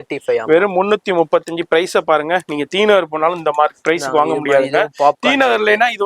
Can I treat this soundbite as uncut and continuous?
yes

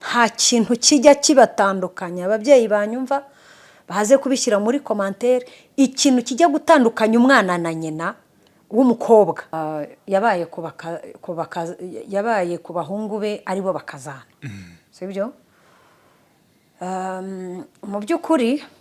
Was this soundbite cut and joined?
yes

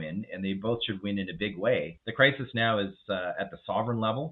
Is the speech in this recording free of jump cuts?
no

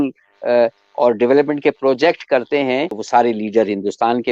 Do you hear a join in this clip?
yes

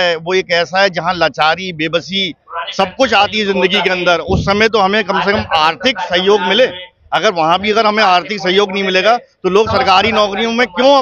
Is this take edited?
no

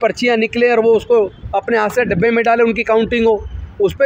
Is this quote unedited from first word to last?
yes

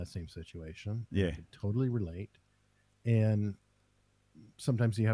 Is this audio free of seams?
yes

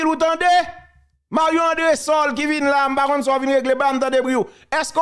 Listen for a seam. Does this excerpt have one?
no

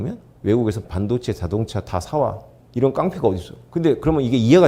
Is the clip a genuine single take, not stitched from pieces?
yes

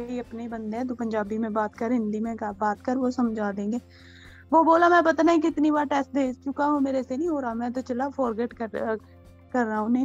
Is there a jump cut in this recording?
no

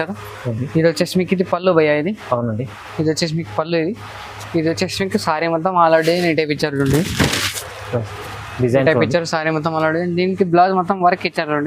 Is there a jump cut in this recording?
no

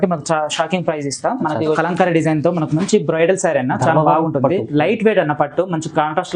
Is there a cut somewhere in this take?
yes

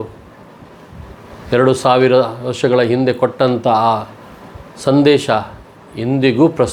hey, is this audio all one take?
yes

